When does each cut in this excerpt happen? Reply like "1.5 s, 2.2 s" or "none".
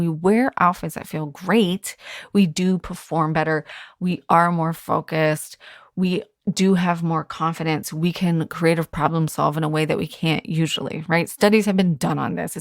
none